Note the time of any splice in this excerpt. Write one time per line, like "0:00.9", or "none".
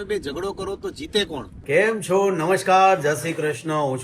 0:01.5